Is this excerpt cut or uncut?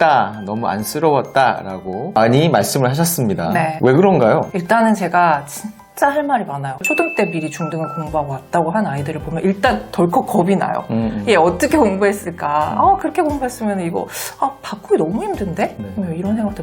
cut